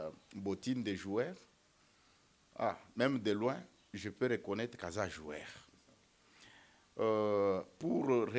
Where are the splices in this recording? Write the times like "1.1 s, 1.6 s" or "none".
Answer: none